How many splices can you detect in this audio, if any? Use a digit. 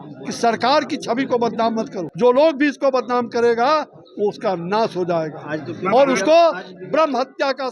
1